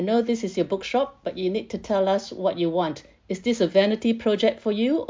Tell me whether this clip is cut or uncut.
uncut